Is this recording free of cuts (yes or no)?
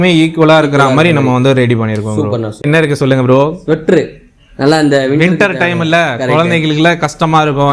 no